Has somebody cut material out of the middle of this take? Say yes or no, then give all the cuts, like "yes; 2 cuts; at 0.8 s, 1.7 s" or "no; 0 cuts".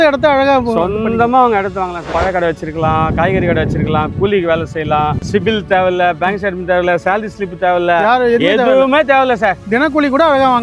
yes; 2 cuts; at 2.1 s, 5.2 s